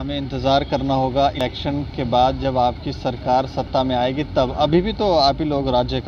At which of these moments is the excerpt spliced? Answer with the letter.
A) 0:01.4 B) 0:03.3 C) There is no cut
A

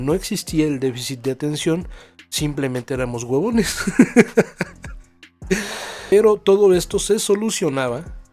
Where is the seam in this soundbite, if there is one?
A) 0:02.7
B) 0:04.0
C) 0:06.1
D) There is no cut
C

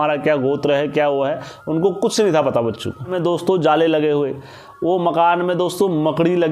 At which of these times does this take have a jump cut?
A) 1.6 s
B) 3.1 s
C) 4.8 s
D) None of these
B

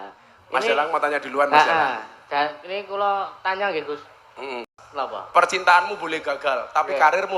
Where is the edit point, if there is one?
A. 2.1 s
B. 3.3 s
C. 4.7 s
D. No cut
C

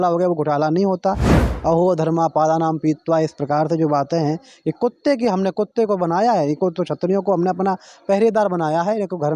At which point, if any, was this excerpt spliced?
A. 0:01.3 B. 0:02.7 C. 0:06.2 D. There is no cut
A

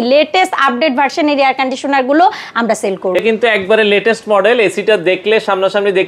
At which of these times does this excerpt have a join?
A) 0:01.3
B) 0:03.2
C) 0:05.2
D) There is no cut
B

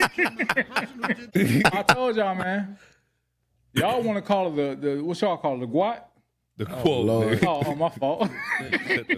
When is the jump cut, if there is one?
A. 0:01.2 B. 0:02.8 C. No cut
A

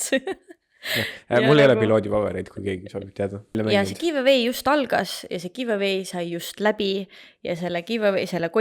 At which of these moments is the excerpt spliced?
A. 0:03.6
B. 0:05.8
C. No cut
A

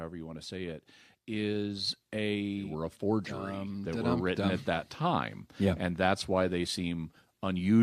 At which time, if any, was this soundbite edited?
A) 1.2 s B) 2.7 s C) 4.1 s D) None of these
B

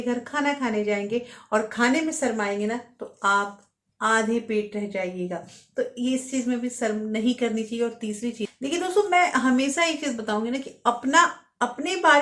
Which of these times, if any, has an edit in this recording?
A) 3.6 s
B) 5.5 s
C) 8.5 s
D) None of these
C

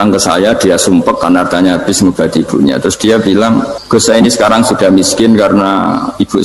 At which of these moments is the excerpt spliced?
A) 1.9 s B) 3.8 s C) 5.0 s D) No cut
B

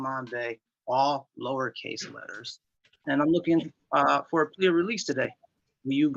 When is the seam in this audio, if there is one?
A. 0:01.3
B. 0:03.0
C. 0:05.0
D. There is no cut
B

